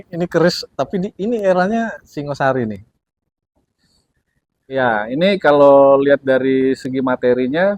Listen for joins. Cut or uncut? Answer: uncut